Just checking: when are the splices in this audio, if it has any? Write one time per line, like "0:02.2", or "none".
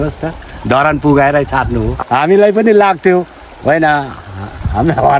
0:02.0